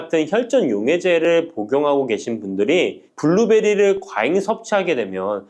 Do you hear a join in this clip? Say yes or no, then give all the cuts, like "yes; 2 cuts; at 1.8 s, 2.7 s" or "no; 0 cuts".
no; 0 cuts